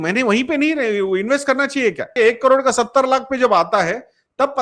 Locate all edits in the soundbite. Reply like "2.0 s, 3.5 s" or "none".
2.1 s